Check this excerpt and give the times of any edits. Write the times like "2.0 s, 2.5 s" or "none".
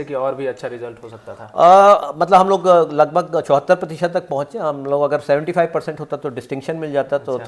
none

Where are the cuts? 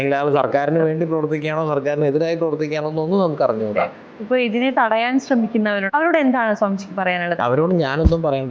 4.1 s, 5.8 s

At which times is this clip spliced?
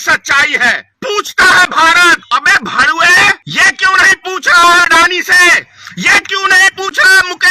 0.9 s, 2.2 s, 3.4 s

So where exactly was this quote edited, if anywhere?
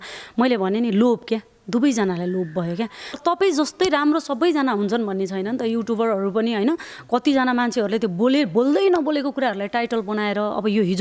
3.1 s

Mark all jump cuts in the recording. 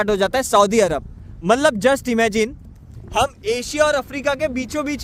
none

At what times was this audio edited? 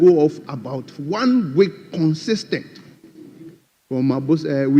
none

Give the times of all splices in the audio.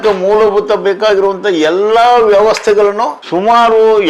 3.2 s

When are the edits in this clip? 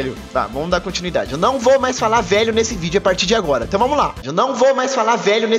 none

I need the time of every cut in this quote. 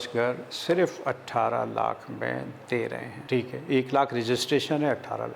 none

